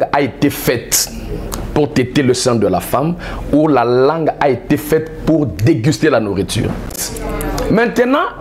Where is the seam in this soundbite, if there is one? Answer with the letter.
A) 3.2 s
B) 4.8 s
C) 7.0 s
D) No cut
C